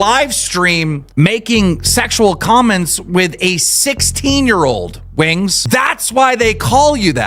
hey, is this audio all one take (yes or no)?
no